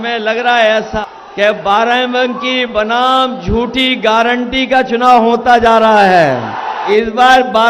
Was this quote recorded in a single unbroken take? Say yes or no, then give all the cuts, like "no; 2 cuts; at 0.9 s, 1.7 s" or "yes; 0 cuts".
no; 2 cuts; at 1.0 s, 6.8 s